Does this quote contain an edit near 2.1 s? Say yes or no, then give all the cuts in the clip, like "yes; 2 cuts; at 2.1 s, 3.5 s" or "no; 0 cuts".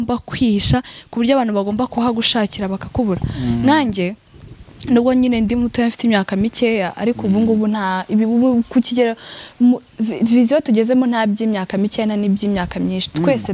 no; 0 cuts